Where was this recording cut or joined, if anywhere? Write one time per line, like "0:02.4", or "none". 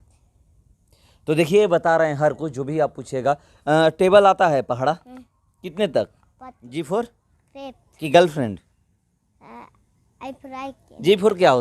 0:06.2